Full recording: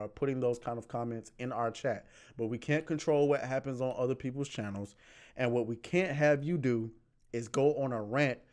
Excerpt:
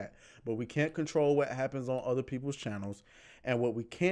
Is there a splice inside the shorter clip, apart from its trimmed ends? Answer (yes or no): no